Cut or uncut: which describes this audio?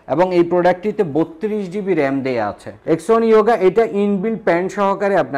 cut